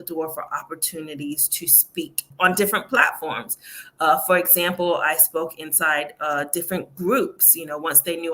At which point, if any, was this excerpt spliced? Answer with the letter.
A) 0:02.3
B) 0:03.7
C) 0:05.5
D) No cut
A